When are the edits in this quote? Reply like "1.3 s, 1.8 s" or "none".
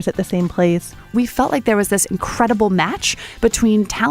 1.1 s